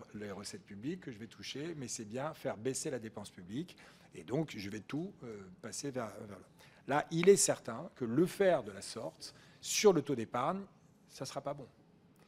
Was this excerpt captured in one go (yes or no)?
yes